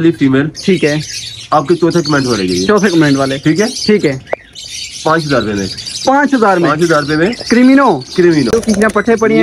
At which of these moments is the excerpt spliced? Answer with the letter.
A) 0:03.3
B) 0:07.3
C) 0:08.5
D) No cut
C